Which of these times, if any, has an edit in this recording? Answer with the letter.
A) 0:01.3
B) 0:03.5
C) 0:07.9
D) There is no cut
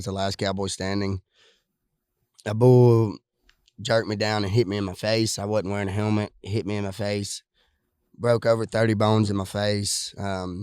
D